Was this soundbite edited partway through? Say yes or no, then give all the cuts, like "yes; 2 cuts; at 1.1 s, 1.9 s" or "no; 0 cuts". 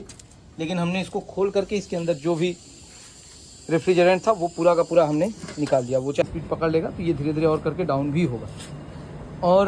yes; 1 cut; at 6.2 s